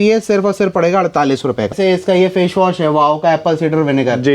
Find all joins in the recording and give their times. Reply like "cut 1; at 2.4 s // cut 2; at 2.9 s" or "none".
cut 1; at 1.7 s